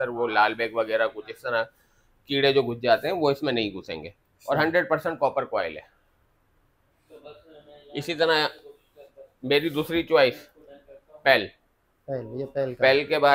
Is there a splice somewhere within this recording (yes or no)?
no